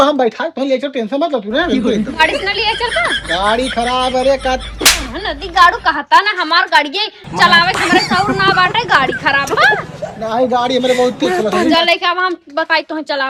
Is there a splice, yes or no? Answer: no